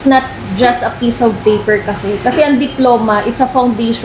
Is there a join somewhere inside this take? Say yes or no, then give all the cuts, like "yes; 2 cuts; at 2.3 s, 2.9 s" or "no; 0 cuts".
no; 0 cuts